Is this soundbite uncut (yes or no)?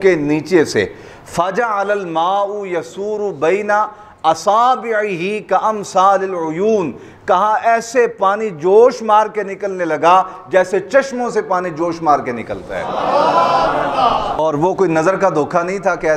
yes